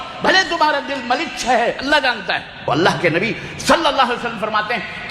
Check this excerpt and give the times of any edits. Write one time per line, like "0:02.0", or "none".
0:02.7